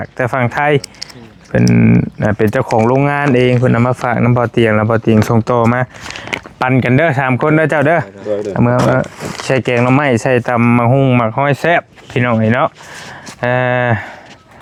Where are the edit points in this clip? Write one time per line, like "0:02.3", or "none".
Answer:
none